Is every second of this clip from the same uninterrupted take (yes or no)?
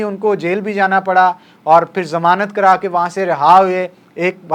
yes